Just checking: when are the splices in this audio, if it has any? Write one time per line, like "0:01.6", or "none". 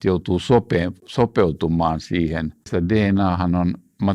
0:02.6